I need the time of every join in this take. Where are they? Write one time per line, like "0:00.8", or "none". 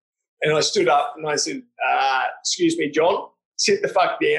0:03.4